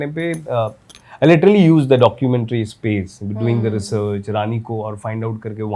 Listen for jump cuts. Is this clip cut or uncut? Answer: uncut